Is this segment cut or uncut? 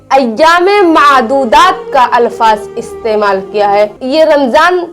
cut